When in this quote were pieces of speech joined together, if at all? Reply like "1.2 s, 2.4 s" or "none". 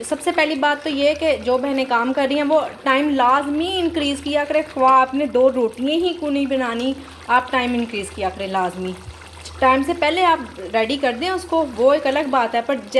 none